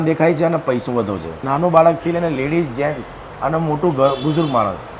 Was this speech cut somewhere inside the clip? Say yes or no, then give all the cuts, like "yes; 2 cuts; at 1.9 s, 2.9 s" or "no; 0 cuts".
yes; 1 cut; at 1.4 s